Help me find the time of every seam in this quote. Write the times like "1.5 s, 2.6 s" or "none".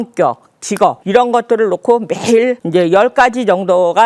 1.0 s, 2.6 s